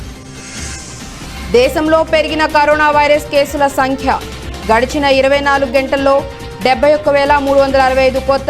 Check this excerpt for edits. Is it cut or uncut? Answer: uncut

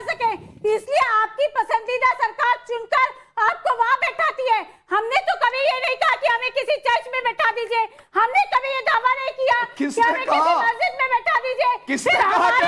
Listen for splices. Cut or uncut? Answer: uncut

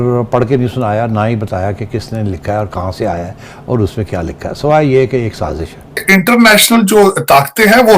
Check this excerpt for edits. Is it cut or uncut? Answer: cut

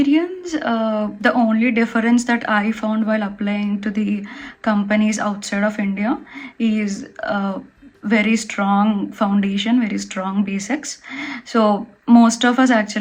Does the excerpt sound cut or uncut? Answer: uncut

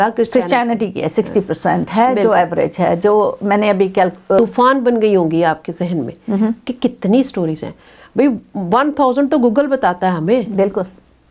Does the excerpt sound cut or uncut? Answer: cut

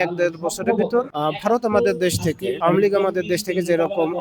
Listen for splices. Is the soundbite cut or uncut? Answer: cut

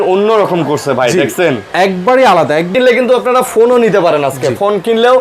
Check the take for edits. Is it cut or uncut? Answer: cut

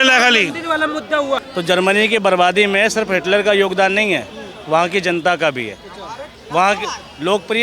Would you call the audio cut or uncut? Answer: cut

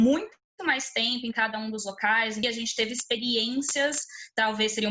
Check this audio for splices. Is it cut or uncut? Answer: cut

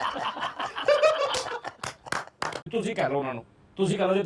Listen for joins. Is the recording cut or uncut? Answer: cut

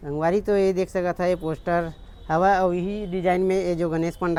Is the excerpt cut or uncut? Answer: uncut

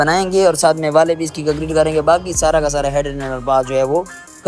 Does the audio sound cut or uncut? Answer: uncut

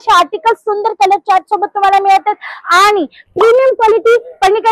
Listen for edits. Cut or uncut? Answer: uncut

